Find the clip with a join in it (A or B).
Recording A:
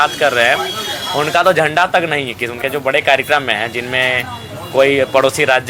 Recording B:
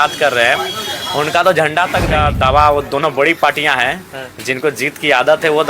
B